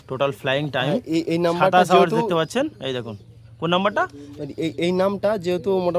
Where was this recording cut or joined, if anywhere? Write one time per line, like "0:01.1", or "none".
none

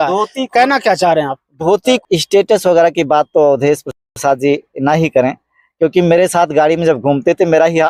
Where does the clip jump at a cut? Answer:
0:02.0

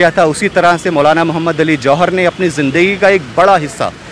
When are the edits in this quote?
none

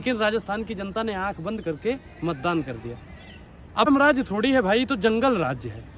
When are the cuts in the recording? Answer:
0:03.9

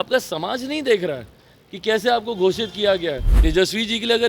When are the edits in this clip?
0:03.3

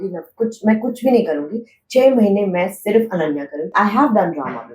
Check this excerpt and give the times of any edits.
0:03.7

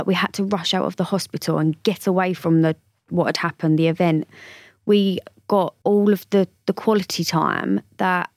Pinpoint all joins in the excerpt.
none

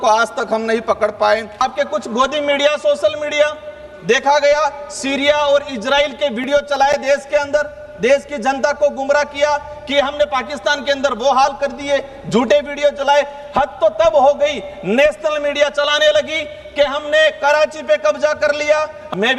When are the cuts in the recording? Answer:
0:01.6

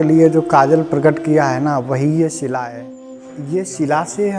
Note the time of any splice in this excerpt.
0:03.1

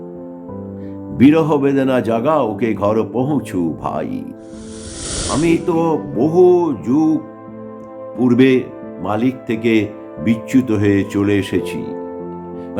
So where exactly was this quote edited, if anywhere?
0:05.1

